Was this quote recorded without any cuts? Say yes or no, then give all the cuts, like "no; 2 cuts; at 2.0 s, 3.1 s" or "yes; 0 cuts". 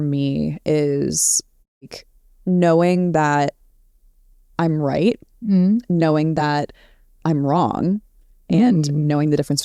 yes; 0 cuts